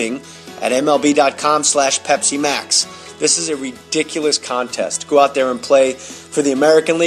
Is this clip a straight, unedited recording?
yes; 0 cuts

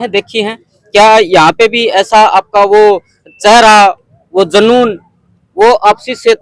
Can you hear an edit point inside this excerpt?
no; 0 cuts

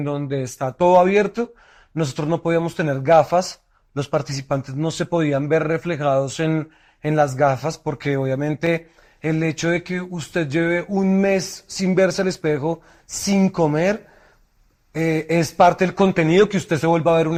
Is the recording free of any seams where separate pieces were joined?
yes; 0 cuts

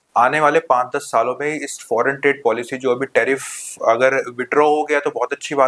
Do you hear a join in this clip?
no; 0 cuts

